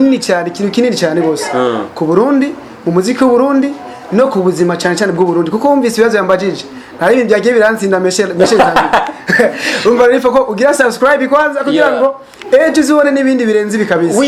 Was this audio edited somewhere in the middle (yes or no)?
no